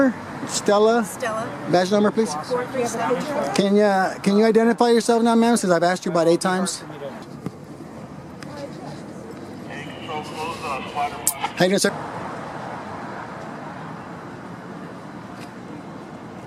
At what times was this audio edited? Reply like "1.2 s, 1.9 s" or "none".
none

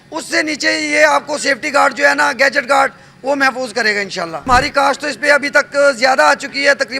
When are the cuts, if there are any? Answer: 4.5 s

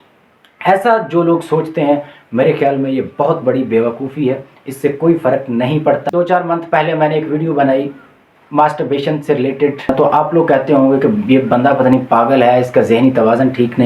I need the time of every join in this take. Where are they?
6.0 s, 9.9 s

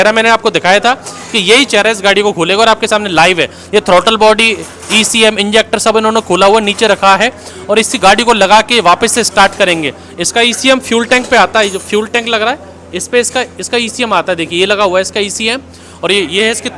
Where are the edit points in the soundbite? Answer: none

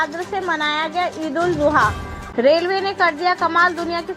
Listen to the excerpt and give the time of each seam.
2.1 s

